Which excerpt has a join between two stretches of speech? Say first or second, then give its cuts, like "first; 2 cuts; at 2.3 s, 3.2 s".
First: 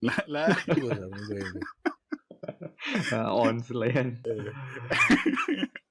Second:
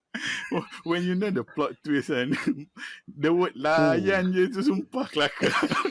first; 1 cut; at 4.2 s